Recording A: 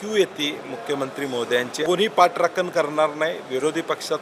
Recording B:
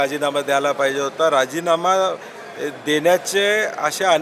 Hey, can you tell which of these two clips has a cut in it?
A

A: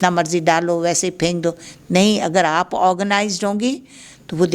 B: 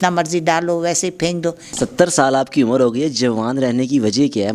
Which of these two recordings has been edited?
B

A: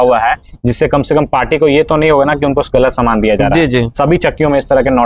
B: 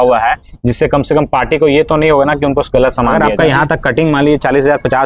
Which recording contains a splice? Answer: B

